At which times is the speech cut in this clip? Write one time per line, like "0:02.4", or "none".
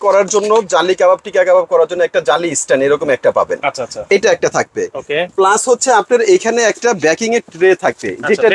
none